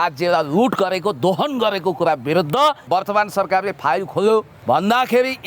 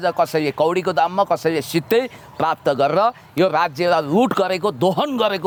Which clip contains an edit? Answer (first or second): first